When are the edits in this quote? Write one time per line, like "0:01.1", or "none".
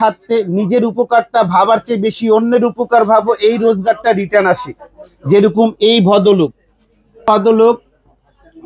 none

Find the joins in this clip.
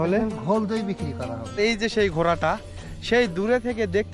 0:01.6

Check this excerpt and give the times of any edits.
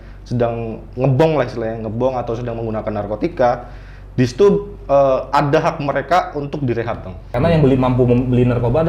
0:07.3

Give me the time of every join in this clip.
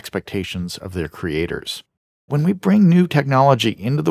0:02.2

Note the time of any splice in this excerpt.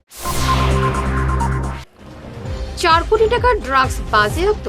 0:01.7

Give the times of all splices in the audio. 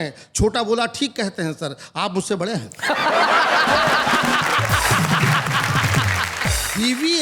none

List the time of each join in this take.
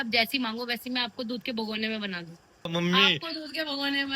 0:02.7

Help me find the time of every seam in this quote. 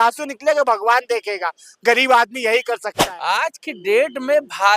0:03.0

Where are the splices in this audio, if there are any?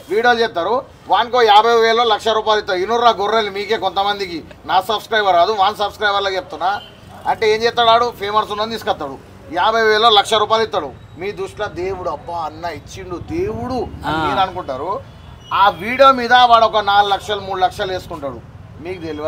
none

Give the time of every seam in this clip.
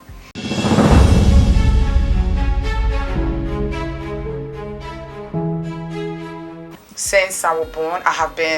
0:06.6

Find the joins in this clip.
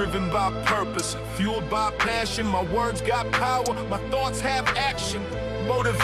none

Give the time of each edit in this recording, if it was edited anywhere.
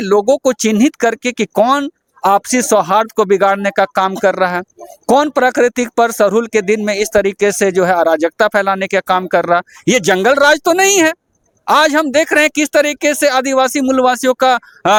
none

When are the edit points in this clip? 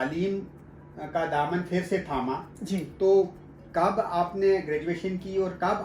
none

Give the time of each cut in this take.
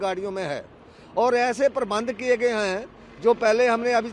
none

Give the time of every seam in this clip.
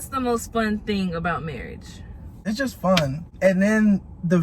0:02.4
0:03.2

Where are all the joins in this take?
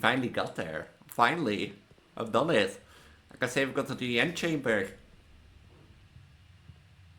none

